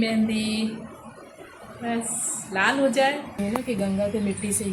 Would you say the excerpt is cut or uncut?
cut